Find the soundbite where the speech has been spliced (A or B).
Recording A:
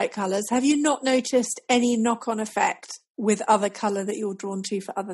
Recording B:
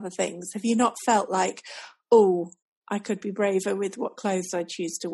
A